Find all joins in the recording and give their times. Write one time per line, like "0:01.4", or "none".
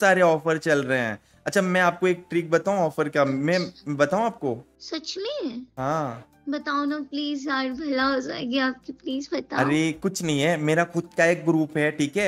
0:04.7